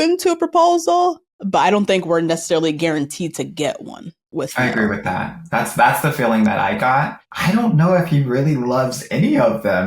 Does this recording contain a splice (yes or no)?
yes